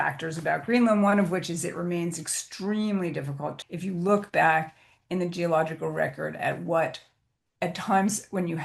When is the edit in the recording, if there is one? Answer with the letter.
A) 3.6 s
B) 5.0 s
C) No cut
A